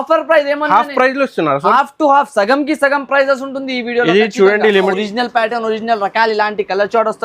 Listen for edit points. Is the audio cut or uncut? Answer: cut